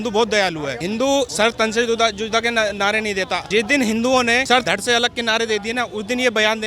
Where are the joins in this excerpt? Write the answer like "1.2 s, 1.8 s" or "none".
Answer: 1.2 s, 3.4 s, 4.7 s